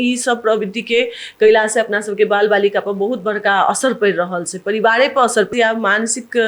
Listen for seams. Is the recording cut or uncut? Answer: cut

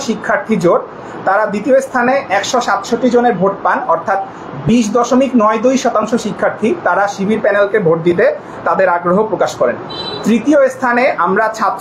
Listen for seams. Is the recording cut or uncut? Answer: uncut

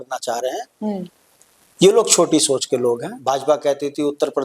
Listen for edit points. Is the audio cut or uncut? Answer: cut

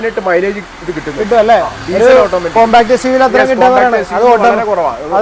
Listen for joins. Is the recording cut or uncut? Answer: uncut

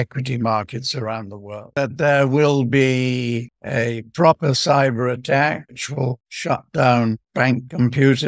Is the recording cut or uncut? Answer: cut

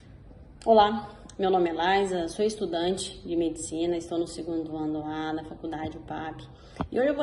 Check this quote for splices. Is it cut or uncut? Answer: uncut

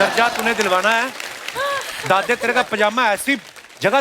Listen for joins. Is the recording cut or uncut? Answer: uncut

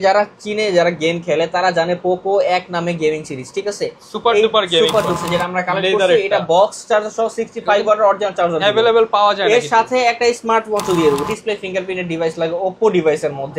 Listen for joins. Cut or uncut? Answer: cut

